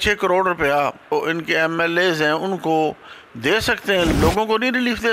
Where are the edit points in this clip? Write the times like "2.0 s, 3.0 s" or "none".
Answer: 1.1 s, 4.1 s